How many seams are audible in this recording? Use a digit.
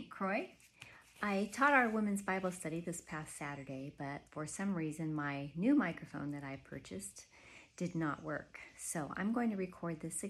1